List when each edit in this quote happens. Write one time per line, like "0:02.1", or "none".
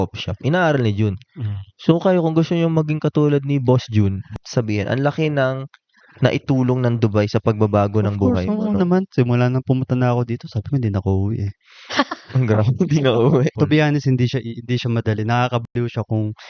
0:04.2
0:13.5